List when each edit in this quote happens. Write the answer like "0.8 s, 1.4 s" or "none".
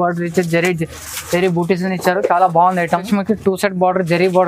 3.1 s